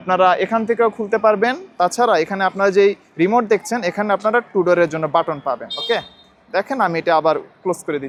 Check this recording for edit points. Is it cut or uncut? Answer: uncut